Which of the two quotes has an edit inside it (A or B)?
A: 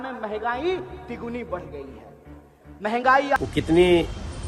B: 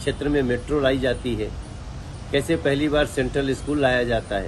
A